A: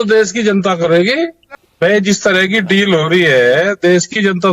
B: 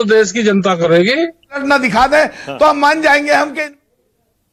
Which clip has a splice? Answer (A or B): A